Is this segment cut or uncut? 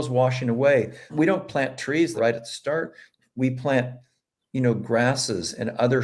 cut